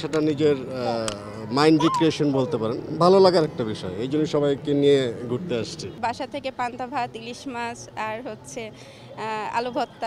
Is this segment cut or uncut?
uncut